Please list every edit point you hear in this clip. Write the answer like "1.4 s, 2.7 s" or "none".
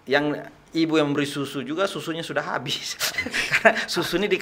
none